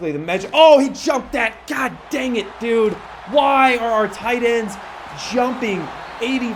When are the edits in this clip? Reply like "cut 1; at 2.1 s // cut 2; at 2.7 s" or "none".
none